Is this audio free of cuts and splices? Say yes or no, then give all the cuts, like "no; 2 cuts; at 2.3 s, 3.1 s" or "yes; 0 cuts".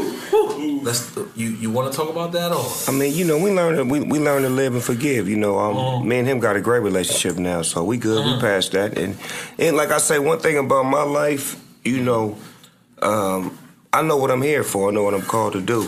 no; 1 cut; at 7.4 s